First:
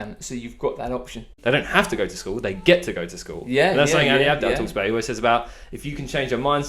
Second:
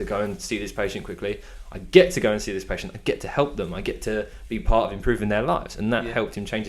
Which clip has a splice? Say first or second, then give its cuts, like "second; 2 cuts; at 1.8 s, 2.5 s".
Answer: first; 1 cut; at 1.4 s